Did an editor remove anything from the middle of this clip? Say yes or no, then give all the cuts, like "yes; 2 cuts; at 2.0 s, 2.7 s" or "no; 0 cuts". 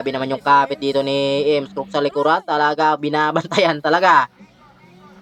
no; 0 cuts